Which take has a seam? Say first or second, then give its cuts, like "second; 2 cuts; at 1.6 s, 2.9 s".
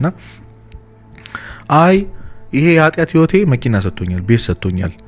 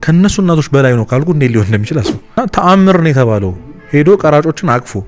second; 1 cut; at 2.4 s